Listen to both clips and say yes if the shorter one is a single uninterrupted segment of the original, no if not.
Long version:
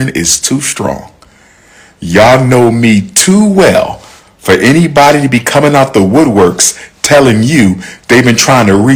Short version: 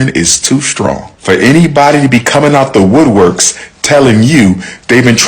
no